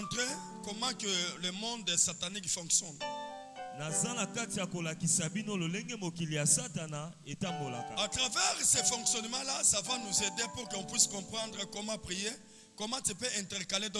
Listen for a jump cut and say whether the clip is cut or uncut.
uncut